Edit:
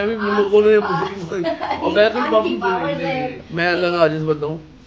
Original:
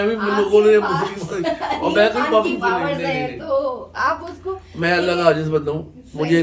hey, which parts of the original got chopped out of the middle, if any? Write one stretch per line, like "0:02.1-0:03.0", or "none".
0:03.4-0:04.6